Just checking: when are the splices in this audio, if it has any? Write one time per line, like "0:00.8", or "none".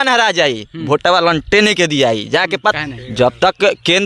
0:02.7